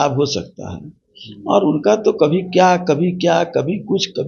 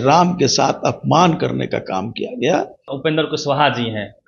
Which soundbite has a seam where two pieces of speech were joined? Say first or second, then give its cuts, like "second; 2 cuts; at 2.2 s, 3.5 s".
second; 1 cut; at 2.9 s